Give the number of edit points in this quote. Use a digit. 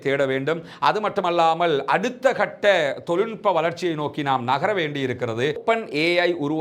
1